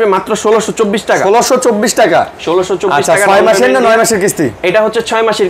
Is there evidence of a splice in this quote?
no; 0 cuts

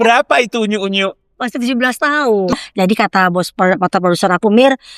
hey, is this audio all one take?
no; 1 cut; at 2.5 s

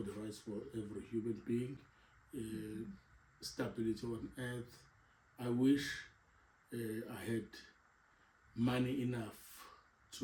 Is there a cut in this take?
no; 0 cuts

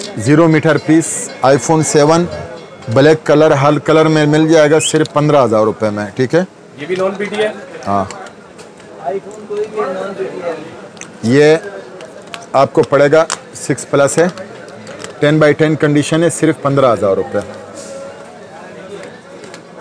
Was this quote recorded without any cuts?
yes; 0 cuts

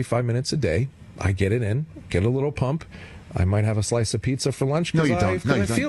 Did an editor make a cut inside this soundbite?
no; 0 cuts

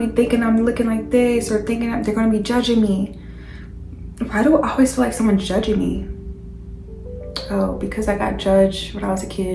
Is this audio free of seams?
yes; 0 cuts

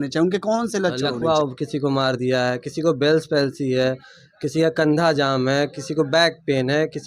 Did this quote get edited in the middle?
yes; 1 cut; at 1.1 s

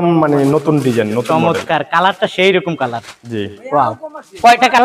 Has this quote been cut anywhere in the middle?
no; 0 cuts

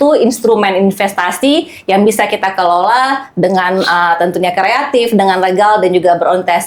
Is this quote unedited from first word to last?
yes; 0 cuts

